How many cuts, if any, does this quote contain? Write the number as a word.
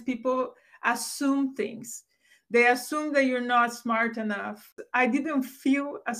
one